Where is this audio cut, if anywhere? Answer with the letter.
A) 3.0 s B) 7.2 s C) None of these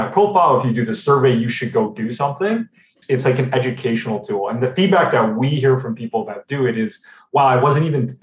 A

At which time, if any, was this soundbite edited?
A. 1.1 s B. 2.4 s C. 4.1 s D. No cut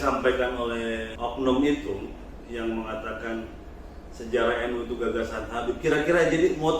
A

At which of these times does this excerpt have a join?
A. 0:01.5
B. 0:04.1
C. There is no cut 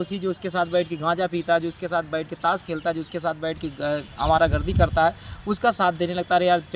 C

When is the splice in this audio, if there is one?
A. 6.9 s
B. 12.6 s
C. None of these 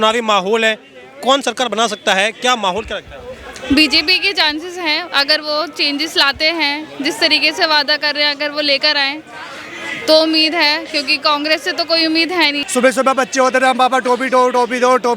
B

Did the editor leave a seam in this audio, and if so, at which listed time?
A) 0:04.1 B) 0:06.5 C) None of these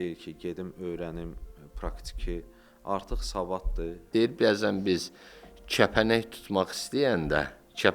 A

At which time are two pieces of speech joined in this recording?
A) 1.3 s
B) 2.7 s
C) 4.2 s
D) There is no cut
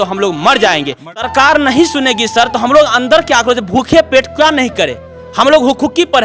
A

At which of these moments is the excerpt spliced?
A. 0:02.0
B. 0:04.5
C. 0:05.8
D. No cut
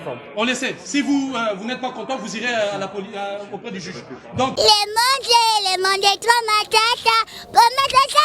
B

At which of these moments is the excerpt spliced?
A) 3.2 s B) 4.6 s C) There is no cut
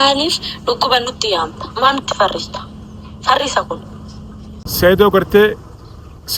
B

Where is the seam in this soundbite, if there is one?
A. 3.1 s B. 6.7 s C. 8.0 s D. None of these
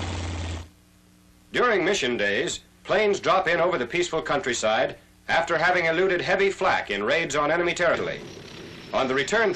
D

